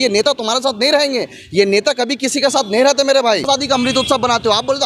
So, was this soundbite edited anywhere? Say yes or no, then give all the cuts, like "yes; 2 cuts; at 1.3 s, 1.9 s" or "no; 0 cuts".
yes; 1 cut; at 3.5 s